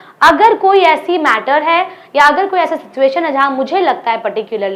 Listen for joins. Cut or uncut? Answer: uncut